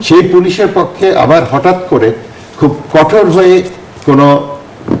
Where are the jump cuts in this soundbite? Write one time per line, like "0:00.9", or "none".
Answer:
none